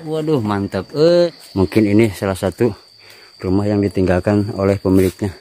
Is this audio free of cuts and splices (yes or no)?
no